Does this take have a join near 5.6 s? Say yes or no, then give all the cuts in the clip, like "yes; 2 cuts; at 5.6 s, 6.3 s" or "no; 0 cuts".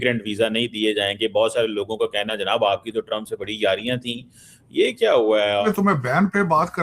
yes; 1 cut; at 5.6 s